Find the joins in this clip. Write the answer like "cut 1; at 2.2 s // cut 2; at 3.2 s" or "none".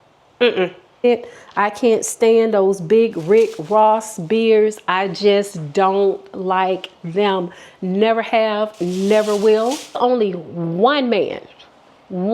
cut 1; at 1.0 s // cut 2; at 10.0 s